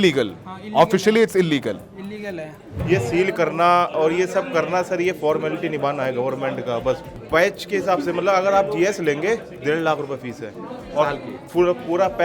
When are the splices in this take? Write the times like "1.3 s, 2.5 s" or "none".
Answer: 2.7 s, 7.1 s